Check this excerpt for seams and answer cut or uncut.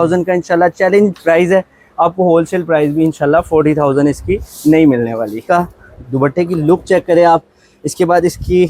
cut